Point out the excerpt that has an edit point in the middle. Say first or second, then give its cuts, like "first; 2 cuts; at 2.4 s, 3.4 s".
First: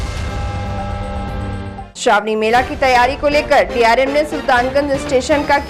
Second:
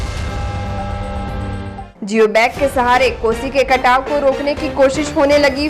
second; 1 cut; at 1.9 s